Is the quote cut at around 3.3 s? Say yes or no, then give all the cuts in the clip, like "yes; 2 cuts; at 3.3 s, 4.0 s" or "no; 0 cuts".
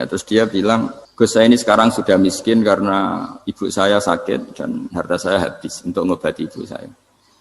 no; 1 cut; at 1.0 s